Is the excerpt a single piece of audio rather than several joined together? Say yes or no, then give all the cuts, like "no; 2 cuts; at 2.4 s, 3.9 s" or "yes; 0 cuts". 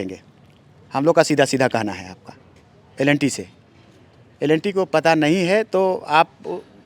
yes; 0 cuts